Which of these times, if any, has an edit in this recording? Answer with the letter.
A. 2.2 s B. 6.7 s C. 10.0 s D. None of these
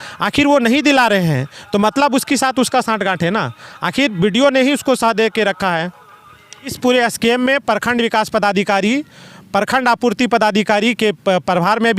B